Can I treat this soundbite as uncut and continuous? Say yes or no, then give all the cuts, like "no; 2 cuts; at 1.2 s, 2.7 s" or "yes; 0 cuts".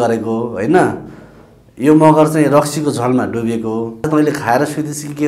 no; 1 cut; at 4.1 s